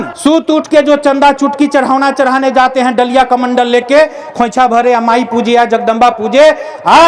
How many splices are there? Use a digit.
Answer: 0